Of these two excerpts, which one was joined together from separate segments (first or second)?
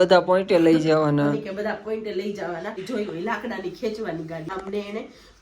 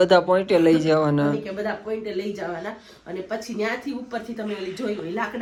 first